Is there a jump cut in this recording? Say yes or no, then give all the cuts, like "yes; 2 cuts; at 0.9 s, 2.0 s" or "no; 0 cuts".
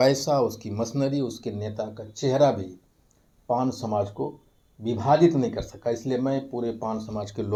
no; 0 cuts